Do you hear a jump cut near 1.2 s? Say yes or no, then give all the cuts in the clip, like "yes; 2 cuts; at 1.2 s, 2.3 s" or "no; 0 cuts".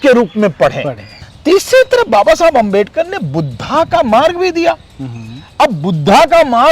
yes; 1 cut; at 1.2 s